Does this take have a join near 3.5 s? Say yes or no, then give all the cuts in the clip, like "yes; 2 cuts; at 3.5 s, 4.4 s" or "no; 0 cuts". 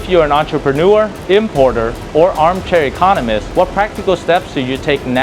yes; 2 cuts; at 1.2 s, 3.5 s